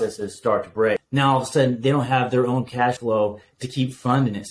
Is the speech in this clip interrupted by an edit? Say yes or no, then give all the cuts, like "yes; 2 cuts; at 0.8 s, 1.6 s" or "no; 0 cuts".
yes; 2 cuts; at 1.0 s, 3.0 s